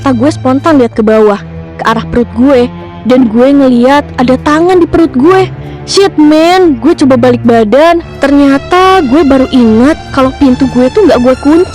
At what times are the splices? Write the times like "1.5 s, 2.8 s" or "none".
8.1 s